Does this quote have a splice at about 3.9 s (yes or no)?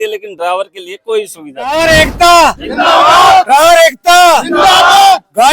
no